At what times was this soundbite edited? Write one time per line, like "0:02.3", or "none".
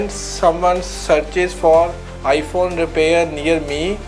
none